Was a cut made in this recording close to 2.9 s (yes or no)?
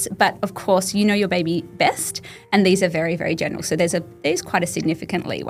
no